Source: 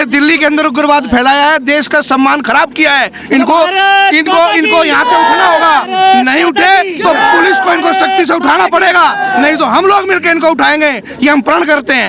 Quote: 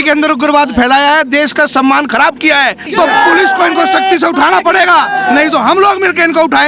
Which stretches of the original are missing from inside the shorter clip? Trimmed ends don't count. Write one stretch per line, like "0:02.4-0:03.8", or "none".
0:03.2-0:06.9

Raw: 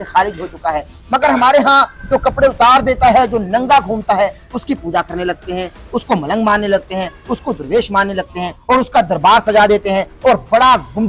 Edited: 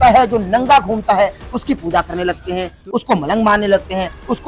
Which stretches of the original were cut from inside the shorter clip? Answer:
none

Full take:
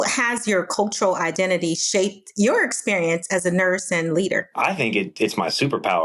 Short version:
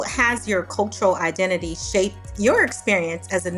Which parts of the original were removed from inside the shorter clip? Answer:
none

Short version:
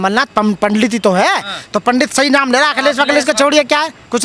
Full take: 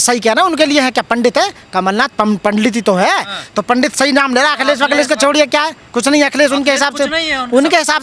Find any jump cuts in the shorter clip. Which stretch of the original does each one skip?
none

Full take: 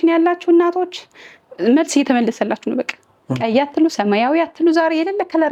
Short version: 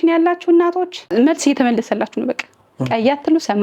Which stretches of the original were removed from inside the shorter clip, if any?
0:01.0-0:01.5

